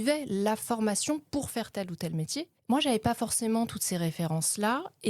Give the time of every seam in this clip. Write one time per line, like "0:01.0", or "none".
0:02.5

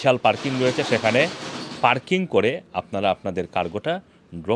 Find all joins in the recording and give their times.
none

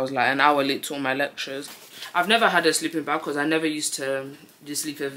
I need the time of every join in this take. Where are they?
0:01.7

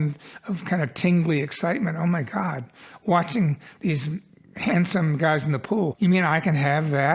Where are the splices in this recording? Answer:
0:05.9

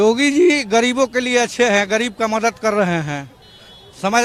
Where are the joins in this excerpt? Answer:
none

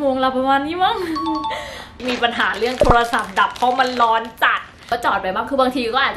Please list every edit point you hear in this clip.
0:02.0
0:04.8

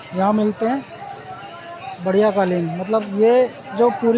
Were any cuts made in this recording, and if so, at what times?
none

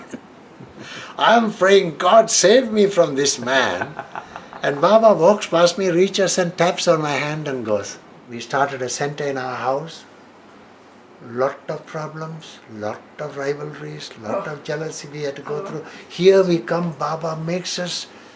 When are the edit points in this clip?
0:08.3

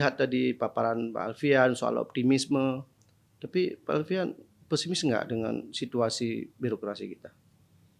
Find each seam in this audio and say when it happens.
none

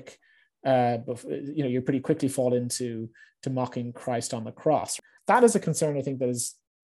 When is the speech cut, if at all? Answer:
0:04.9

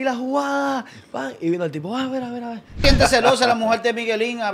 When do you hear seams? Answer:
0:02.8

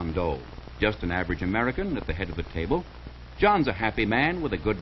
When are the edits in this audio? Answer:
none

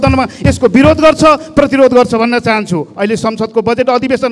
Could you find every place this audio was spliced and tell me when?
none

